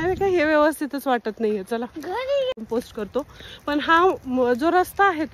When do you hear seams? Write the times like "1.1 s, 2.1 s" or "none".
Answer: 2.6 s